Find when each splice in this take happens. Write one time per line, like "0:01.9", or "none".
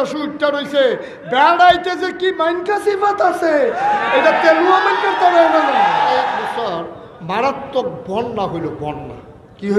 0:06.3